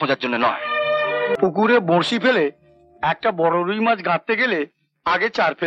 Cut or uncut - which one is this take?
cut